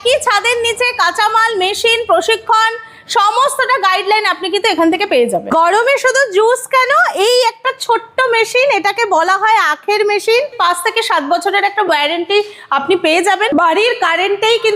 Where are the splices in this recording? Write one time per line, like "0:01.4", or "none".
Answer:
0:05.4
0:10.5
0:13.5